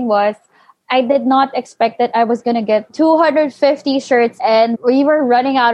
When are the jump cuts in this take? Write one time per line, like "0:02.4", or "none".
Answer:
0:02.9
0:04.5